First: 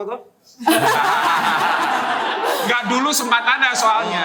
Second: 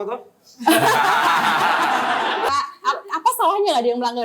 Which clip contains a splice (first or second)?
second